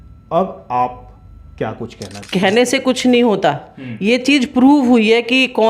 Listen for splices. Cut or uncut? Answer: cut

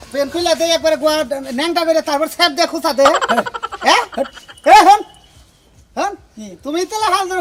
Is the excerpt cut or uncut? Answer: uncut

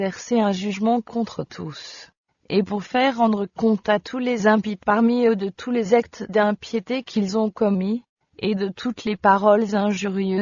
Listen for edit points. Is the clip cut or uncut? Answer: cut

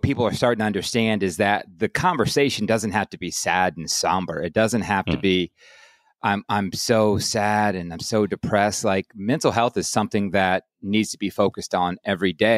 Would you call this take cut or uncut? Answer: uncut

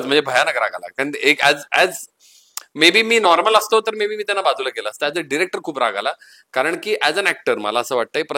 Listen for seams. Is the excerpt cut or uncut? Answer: uncut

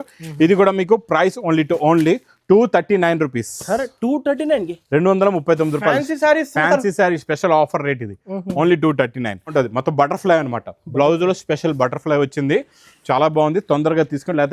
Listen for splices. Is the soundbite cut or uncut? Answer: cut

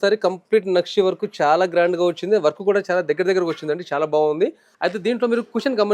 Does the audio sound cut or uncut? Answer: cut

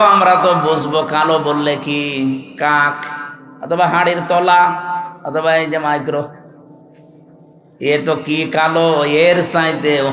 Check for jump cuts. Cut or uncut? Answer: uncut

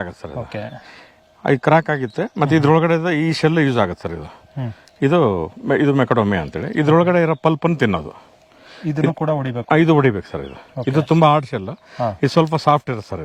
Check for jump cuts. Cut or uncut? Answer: uncut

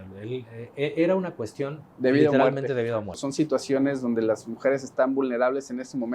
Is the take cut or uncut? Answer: cut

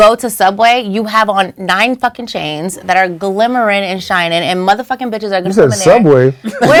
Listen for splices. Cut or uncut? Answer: uncut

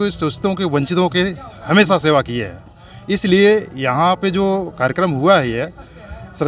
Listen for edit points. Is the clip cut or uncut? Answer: uncut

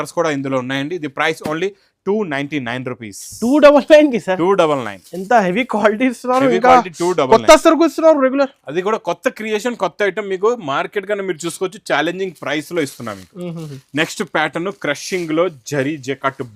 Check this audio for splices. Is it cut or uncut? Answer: uncut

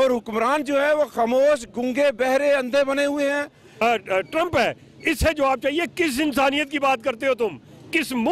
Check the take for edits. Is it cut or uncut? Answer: cut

